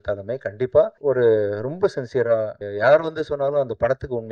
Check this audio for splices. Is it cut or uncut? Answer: cut